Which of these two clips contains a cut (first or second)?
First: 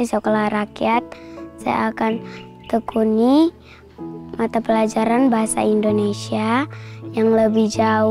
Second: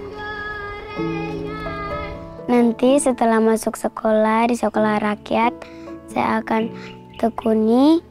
second